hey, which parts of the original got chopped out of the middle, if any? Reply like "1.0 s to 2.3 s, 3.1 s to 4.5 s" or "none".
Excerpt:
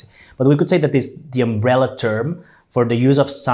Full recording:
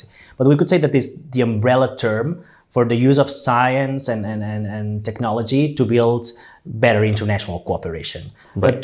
none